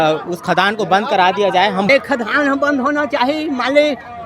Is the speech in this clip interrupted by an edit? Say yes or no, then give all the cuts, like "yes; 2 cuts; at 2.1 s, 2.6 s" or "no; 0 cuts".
yes; 1 cut; at 1.9 s